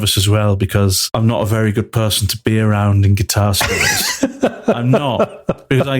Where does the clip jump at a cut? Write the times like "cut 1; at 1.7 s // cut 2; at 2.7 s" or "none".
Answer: cut 1; at 1.0 s